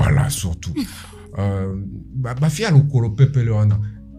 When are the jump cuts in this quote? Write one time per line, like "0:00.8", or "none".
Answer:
none